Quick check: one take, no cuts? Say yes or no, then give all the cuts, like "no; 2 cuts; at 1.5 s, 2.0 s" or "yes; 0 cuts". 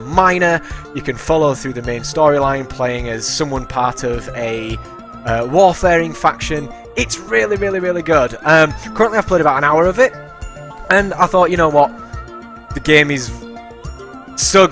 no; 1 cut; at 7.7 s